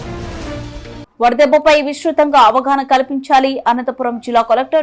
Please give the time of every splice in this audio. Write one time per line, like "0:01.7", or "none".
0:01.0